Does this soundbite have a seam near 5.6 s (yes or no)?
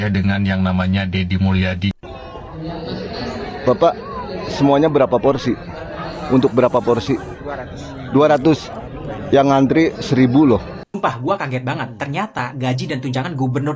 no